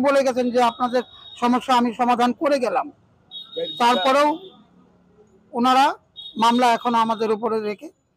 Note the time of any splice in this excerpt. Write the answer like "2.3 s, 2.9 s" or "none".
none